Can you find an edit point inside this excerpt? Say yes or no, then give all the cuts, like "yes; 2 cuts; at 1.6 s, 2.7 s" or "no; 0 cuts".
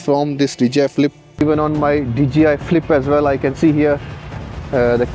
yes; 1 cut; at 1.2 s